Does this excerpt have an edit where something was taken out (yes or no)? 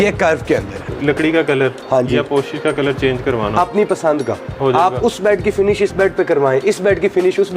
yes